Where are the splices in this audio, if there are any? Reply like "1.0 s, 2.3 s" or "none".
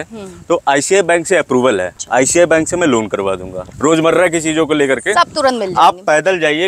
1.9 s, 3.7 s